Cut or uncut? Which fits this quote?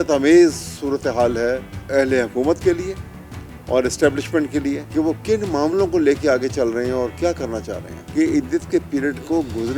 cut